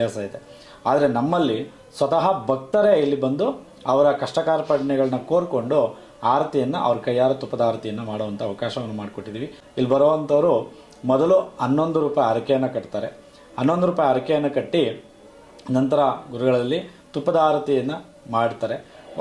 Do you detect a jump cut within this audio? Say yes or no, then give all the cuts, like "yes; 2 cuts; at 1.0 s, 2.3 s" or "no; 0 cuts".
yes; 1 cut; at 9.6 s